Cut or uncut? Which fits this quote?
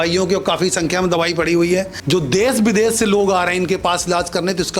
cut